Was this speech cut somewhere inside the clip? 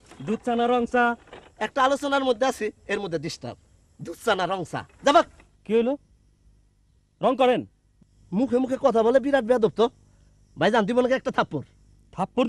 no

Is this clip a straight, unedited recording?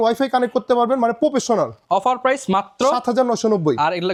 yes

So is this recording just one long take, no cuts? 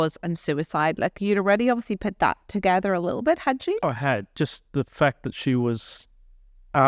yes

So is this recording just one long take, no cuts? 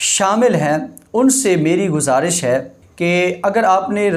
no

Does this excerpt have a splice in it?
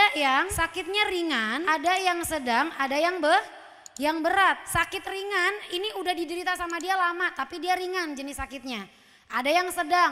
no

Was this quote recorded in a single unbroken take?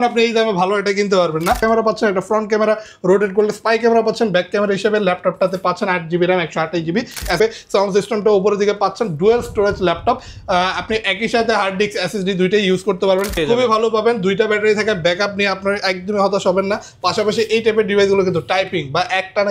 no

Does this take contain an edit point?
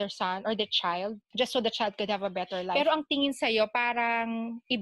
yes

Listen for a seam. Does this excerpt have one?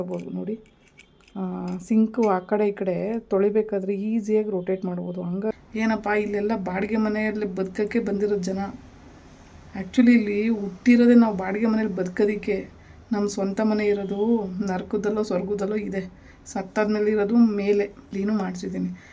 yes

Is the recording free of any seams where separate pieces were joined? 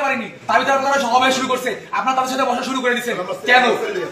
yes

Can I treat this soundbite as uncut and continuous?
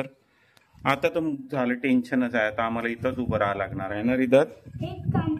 yes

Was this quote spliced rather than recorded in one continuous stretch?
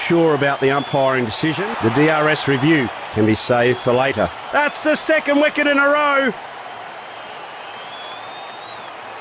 yes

